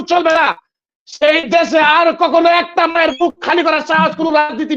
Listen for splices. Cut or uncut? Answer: uncut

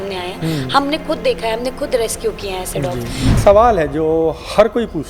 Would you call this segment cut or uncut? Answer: cut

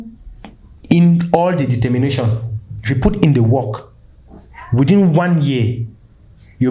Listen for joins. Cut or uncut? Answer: uncut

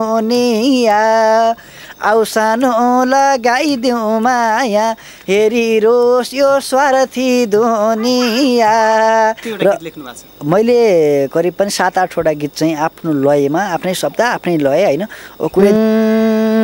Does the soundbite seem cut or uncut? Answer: cut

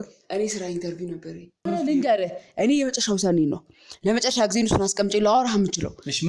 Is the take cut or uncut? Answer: cut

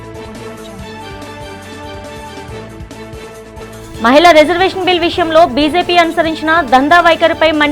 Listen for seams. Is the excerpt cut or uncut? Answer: cut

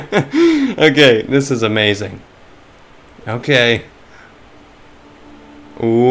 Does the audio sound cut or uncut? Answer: uncut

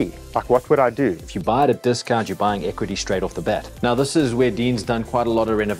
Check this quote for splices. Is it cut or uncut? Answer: cut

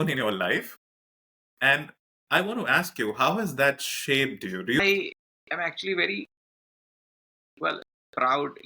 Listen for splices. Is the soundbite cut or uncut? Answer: cut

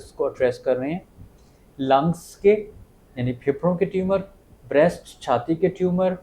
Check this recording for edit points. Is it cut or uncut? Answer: uncut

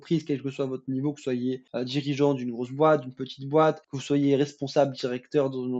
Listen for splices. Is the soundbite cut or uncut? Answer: cut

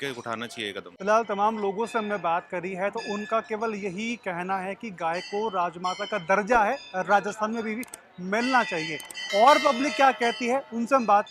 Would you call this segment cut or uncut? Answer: uncut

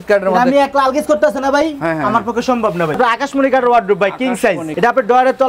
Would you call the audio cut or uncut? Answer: cut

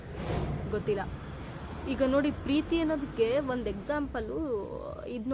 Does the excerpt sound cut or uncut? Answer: uncut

